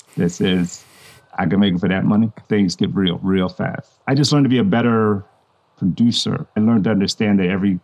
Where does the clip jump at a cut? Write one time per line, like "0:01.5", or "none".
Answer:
0:02.4
0:06.6